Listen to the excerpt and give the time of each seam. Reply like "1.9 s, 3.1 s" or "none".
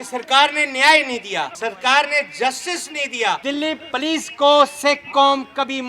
1.5 s, 3.4 s